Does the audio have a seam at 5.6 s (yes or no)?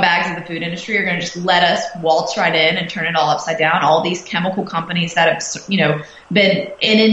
no